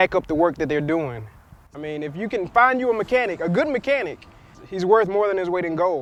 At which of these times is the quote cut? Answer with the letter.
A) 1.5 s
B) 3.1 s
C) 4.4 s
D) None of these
D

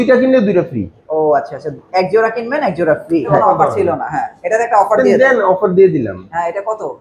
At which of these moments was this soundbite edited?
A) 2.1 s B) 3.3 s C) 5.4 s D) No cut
B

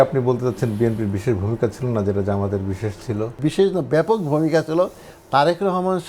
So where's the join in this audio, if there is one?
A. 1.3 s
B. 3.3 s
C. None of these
B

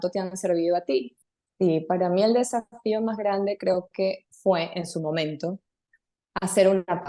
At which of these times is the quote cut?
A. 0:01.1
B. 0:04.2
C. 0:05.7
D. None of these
A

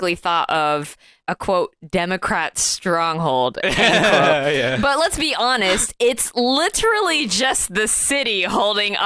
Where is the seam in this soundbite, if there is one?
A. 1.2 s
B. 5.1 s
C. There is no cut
A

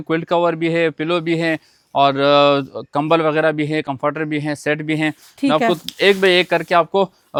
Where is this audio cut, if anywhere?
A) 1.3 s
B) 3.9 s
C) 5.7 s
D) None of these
D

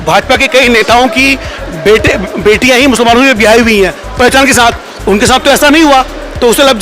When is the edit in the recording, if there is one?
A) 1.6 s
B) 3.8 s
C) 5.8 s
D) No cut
D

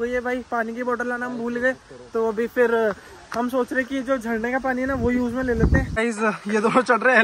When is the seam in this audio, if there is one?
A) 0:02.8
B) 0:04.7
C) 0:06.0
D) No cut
C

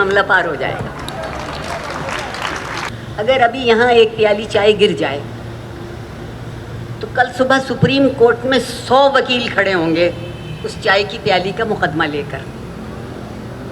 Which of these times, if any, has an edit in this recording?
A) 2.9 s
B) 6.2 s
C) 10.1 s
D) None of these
A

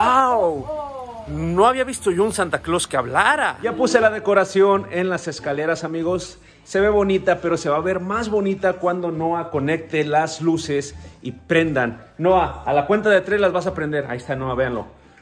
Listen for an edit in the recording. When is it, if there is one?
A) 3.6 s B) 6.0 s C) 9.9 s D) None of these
A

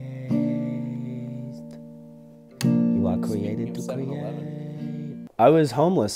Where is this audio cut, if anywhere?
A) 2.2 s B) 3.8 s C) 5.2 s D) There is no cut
C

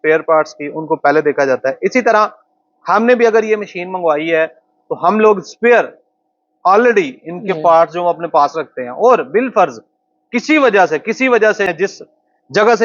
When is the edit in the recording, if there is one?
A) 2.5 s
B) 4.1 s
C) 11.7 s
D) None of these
C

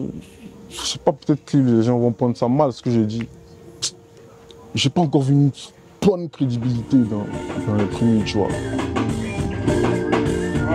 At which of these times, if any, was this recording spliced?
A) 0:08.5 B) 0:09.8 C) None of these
A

